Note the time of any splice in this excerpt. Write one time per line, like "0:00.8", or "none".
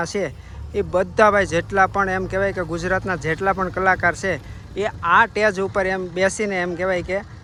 none

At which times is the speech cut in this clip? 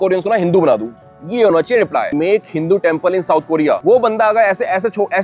0:02.1
0:03.8

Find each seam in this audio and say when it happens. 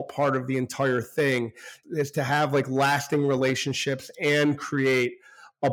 0:01.7

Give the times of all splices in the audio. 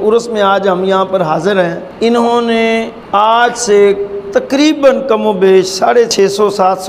0:01.8
0:03.0

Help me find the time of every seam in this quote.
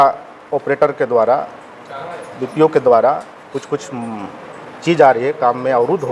none

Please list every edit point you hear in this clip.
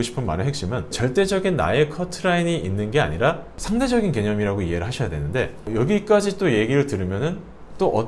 none

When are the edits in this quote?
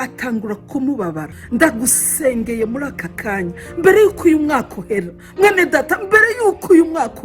0:01.3

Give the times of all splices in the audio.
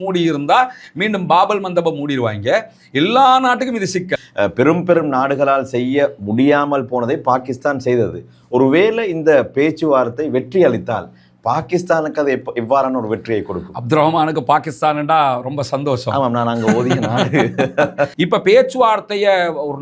0:04.2
0:18.1

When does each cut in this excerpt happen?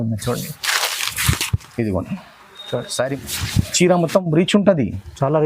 0:03.1

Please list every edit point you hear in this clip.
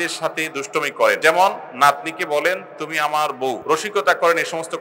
0:01.2
0:03.6

